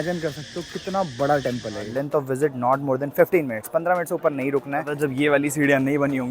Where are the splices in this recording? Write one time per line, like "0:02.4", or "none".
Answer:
0:01.9
0:04.9

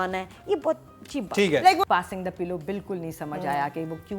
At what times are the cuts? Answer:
0:01.8

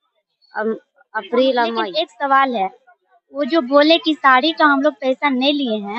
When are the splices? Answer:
0:01.9

